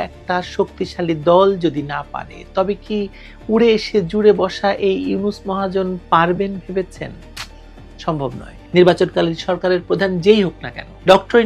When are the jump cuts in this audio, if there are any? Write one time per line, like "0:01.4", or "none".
0:08.5